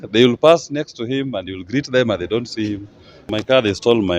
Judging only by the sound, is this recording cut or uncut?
cut